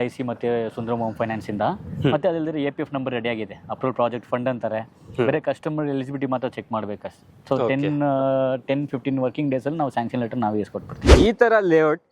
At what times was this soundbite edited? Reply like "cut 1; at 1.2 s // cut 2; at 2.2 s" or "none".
cut 1; at 11.1 s